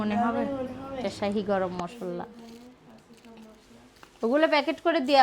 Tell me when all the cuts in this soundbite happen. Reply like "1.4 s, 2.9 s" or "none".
1.0 s